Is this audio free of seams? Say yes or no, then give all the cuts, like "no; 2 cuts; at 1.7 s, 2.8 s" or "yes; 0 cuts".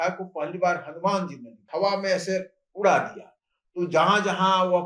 no; 1 cut; at 1.7 s